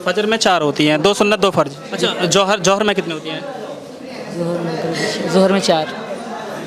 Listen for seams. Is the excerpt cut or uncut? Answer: cut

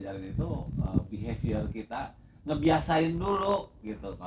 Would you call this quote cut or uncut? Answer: uncut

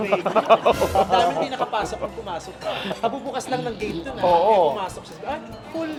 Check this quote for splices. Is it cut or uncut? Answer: uncut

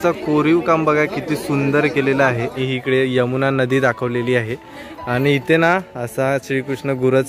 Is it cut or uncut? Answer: cut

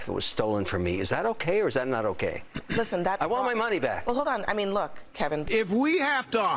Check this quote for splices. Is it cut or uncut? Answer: cut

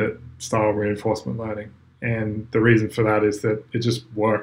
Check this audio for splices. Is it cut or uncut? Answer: uncut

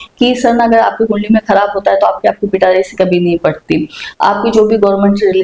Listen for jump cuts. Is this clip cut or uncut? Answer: uncut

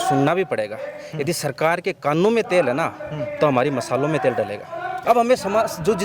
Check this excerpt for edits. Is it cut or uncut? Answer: cut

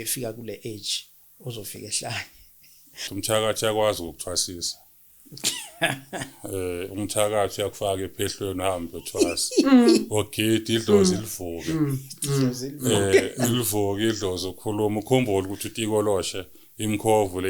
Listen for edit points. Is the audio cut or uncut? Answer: cut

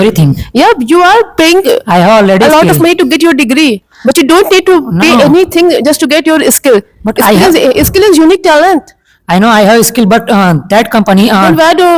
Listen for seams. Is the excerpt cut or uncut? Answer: uncut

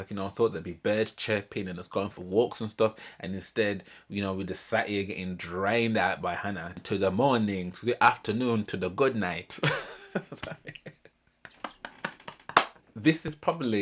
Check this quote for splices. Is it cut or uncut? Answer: cut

